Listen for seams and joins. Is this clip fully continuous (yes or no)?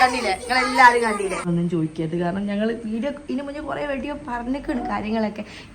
no